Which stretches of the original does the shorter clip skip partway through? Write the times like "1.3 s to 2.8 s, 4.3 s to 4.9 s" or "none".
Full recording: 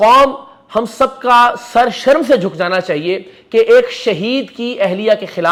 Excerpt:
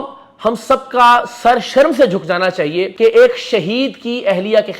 3.2 s to 3.4 s